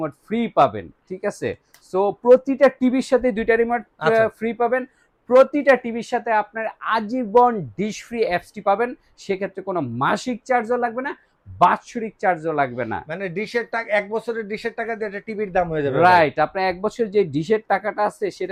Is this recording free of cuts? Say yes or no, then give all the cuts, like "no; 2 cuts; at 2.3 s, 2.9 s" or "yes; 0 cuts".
yes; 0 cuts